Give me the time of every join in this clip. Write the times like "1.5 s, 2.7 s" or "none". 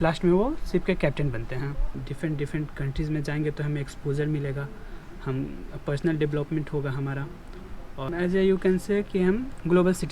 2.0 s, 8.0 s